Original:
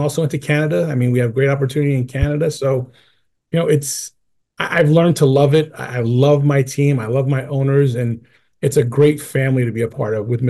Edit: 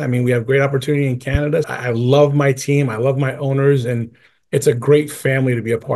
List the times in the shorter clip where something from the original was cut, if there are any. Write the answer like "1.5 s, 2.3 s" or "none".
1.7 s